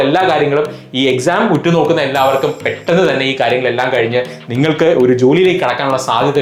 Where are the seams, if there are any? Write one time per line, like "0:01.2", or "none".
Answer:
none